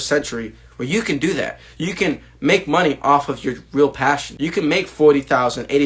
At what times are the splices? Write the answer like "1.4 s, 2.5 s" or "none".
4.3 s